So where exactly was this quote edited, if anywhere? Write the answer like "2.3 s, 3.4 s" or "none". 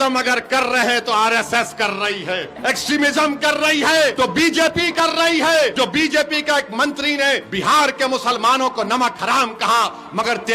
2.5 s, 4.1 s, 5.7 s, 7.5 s